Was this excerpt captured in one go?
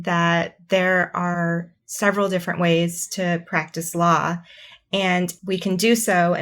no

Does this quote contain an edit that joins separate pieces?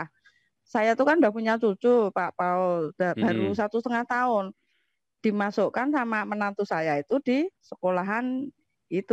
no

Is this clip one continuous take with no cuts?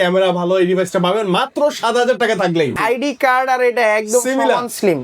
no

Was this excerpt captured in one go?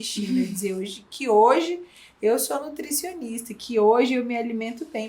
yes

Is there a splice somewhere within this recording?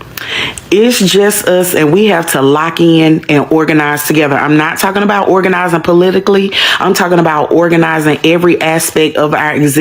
no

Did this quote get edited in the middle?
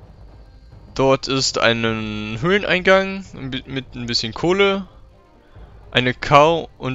yes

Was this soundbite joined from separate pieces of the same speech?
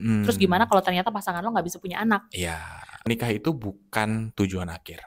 yes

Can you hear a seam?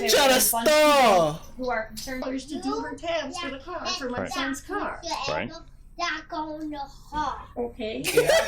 yes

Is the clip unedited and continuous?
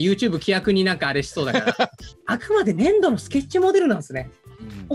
yes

